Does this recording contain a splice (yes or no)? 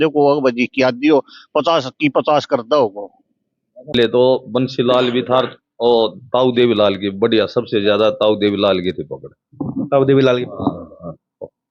yes